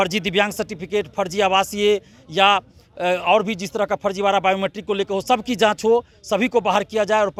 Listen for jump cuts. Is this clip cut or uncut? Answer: uncut